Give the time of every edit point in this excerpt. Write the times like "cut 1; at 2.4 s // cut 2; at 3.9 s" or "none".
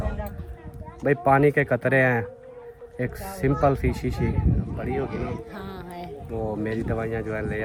none